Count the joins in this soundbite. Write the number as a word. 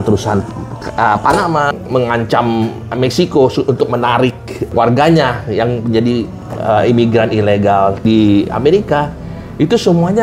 three